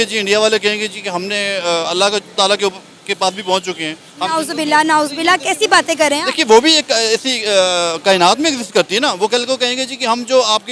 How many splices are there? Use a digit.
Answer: 0